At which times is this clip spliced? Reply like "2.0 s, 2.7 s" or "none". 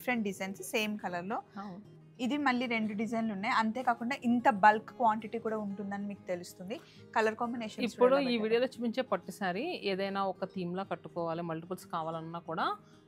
none